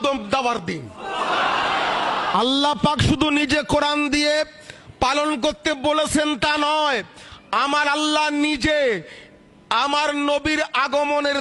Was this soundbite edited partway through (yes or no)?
yes